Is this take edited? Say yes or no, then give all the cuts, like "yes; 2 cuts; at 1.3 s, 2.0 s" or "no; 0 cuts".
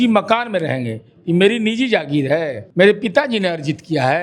yes; 1 cut; at 2.6 s